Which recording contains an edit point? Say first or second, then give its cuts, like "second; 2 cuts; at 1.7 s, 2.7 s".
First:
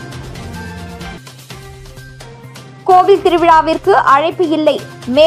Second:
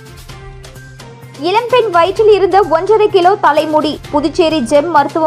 first; 1 cut; at 1.1 s